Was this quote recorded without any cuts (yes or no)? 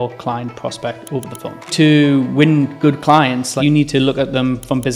no